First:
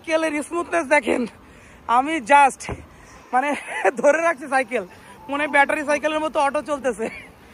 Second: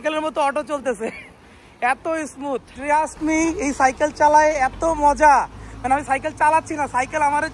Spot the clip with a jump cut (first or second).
second